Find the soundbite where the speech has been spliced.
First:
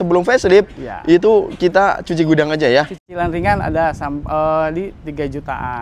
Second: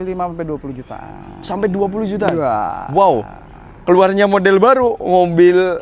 first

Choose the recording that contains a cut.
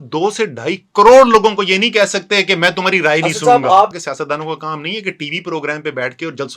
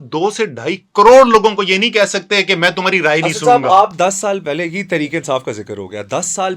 first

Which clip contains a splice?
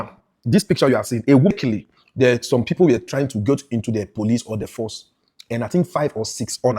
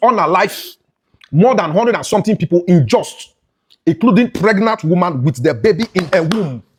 first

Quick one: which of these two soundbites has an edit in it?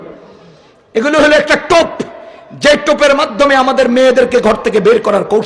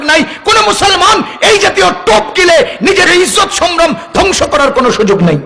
second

